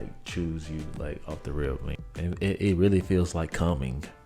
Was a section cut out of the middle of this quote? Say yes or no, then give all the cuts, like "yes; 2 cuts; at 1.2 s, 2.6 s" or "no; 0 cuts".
yes; 1 cut; at 1.8 s